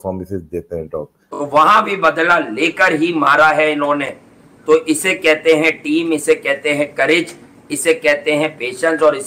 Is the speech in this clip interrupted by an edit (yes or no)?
yes